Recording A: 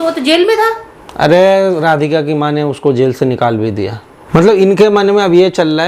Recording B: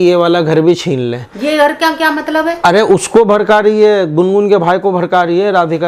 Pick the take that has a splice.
A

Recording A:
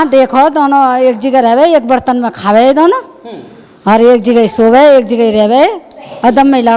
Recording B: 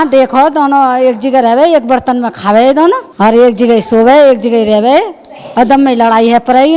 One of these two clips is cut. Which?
B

